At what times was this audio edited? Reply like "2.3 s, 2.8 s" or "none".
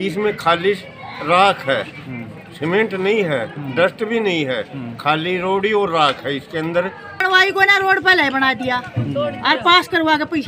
7.2 s

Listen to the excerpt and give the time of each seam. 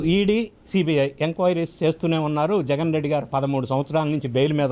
none

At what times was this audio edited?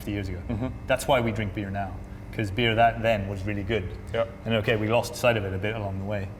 none

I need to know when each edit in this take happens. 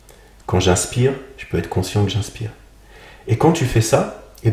none

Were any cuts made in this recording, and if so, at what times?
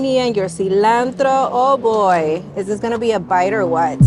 none

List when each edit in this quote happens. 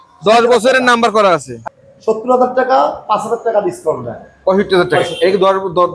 1.5 s

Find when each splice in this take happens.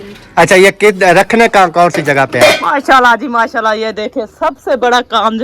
2.7 s

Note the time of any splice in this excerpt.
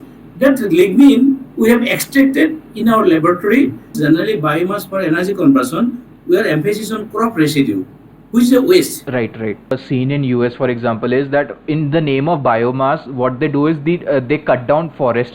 3.9 s, 9.8 s

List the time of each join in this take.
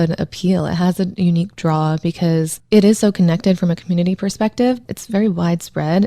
none

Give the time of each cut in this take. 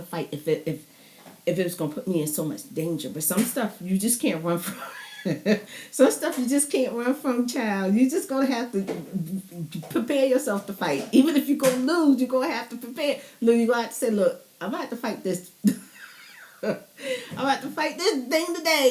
none

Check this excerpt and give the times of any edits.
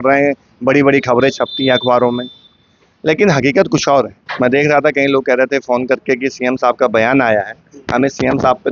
4.2 s

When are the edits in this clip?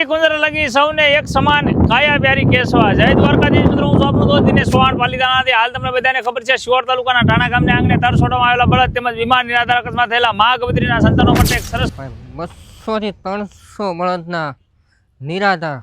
11.9 s

